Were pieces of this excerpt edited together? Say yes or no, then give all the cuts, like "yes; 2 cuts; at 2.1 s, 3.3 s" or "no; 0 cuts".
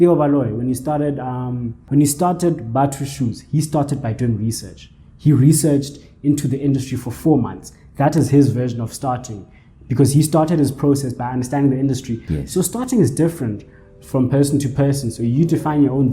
yes; 2 cuts; at 1.8 s, 12.2 s